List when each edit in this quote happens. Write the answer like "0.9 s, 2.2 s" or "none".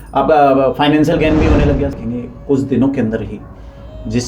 1.9 s